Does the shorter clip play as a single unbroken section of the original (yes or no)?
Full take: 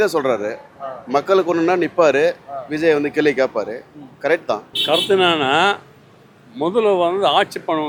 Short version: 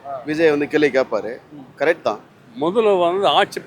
no